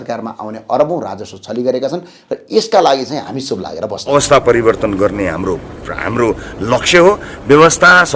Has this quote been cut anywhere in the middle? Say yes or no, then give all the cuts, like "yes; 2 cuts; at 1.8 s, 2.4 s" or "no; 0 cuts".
yes; 1 cut; at 4.0 s